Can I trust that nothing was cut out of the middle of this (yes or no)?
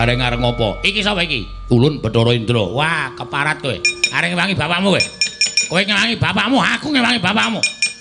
no